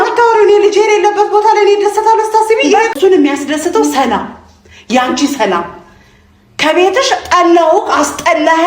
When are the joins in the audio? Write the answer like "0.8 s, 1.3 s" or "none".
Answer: 2.9 s

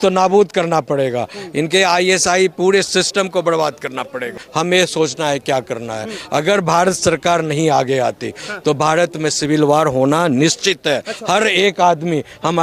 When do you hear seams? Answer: 4.4 s

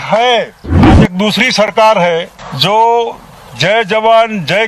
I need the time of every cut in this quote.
1.0 s, 2.4 s

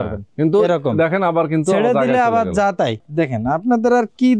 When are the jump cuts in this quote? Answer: 3.0 s

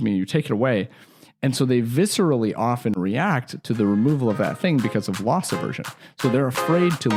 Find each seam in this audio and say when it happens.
none

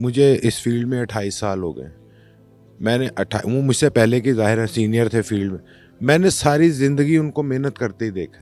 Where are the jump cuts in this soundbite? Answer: none

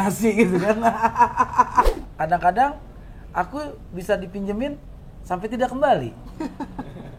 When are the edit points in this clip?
1.9 s

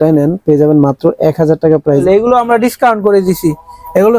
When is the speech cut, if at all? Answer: 2.0 s

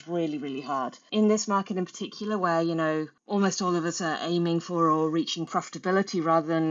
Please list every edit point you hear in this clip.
1.1 s, 3.2 s

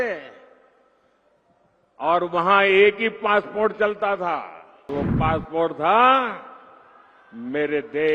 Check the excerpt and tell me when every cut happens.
4.9 s

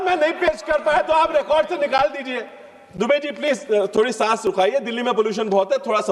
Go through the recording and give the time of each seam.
none

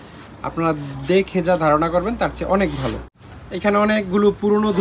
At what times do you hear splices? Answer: 3.1 s

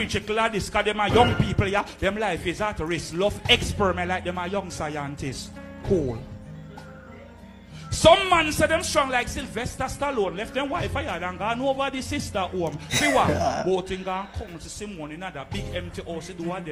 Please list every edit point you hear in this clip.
7.5 s

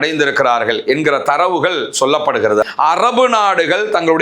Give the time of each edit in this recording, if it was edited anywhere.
2.6 s

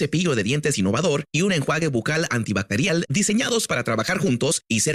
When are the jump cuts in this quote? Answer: none

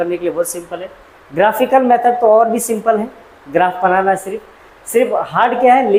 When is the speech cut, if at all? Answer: none

